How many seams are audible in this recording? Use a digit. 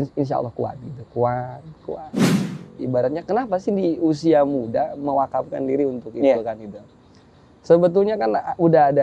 1